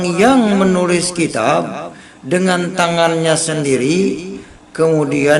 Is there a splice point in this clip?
no; 0 cuts

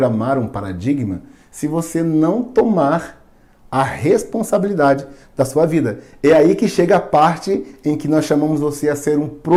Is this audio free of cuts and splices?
yes; 0 cuts

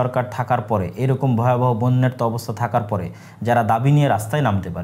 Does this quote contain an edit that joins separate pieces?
no; 0 cuts

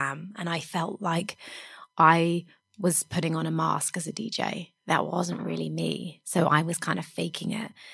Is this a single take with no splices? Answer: yes; 0 cuts

